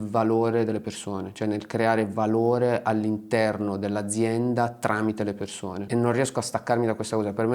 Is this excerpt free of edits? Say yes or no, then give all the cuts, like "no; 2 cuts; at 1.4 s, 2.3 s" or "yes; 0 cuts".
no; 1 cut; at 5.7 s